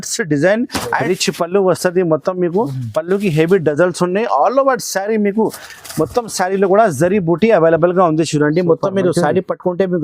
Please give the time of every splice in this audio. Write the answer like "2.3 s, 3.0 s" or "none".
1.0 s